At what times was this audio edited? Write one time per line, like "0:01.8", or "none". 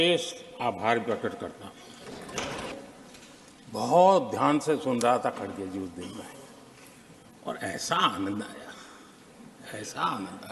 0:02.7
0:07.0